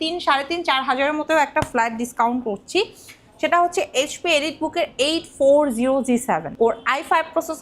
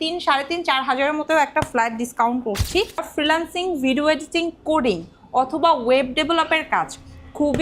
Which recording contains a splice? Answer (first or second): second